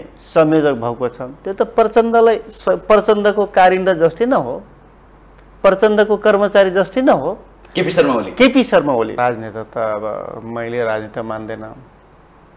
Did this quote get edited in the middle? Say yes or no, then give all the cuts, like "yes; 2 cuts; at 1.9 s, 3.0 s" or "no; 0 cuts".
yes; 1 cut; at 9.1 s